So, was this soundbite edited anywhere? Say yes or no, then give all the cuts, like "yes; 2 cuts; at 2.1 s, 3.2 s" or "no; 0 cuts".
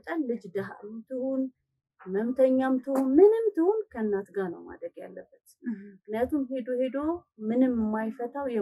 no; 0 cuts